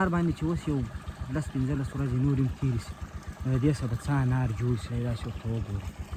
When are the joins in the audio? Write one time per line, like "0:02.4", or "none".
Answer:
none